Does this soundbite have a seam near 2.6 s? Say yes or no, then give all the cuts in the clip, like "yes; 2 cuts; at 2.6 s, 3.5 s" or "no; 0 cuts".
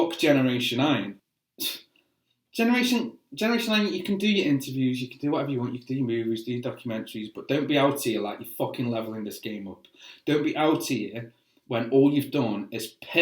no; 1 cut; at 1.1 s